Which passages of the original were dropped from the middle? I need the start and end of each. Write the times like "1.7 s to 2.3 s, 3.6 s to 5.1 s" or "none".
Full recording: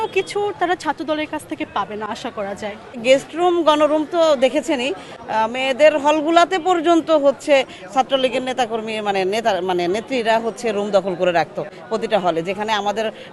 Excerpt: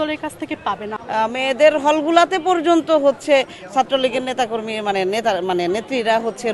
2.0 s to 5.1 s